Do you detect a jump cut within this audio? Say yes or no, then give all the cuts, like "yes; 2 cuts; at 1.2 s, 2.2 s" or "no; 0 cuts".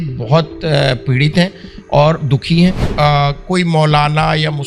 yes; 1 cut; at 2.8 s